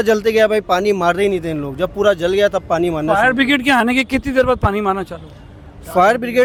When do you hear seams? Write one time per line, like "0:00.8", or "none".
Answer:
none

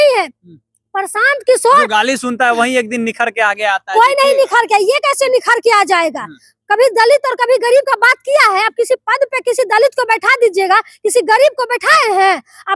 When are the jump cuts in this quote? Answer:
none

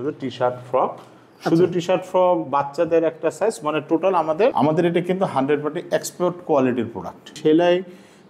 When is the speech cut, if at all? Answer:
0:04.5
0:07.4

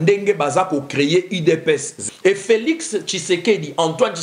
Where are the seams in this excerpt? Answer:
0:01.9

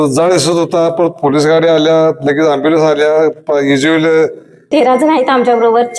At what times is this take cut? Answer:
0:04.7

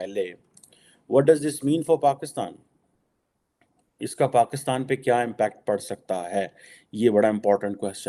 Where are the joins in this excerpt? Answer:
none

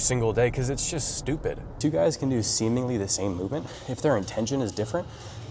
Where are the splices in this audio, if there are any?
0:01.7
0:03.8

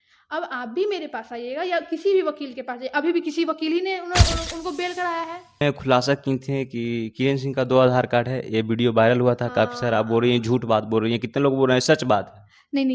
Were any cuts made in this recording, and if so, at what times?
0:05.6

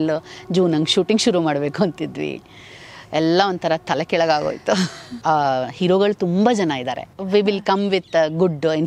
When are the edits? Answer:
0:05.1
0:07.1

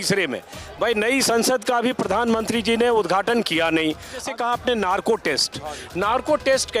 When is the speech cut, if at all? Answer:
0:04.2

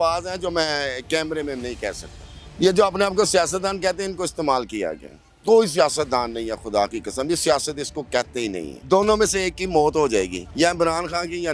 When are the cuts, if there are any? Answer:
0:02.4
0:08.7
0:10.4

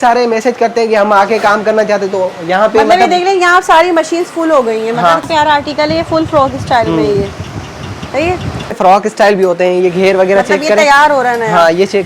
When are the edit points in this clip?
0:05.2
0:08.7

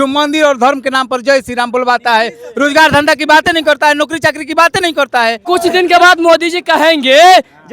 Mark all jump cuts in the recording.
0:05.4

